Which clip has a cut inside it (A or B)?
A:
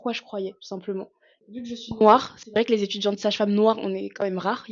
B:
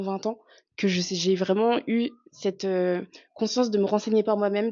A